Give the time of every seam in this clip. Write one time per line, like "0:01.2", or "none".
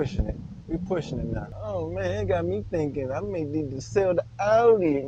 0:01.6